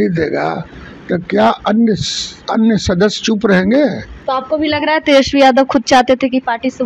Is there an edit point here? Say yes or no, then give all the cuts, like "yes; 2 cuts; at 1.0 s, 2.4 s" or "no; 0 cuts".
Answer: yes; 1 cut; at 4.2 s